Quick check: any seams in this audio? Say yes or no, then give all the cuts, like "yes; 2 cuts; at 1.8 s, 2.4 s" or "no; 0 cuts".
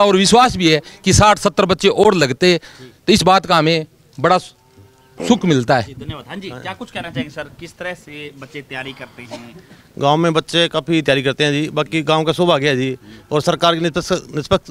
no; 0 cuts